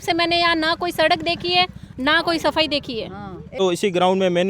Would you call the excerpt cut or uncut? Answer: cut